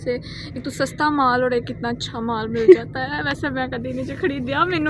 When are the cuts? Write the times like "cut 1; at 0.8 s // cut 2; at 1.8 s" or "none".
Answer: none